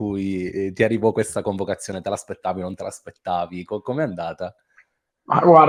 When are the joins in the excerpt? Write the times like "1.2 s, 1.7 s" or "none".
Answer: none